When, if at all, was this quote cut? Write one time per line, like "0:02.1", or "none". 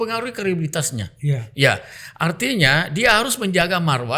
none